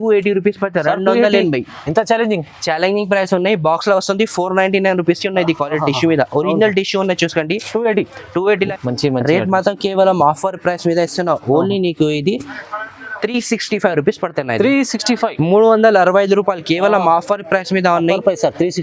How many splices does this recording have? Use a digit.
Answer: 1